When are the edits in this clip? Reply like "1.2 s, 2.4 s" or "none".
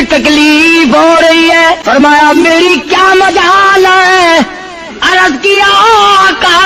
1.8 s